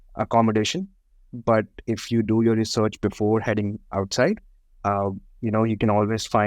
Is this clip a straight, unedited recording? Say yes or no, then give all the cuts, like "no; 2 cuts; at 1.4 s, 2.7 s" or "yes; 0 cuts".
no; 1 cut; at 1.2 s